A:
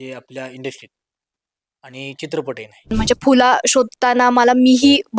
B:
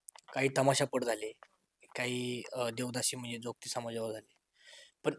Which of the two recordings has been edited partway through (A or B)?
A